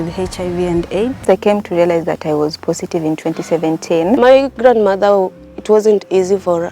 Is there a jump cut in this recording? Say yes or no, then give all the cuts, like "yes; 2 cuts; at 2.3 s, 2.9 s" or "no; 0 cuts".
yes; 2 cuts; at 1.2 s, 4.2 s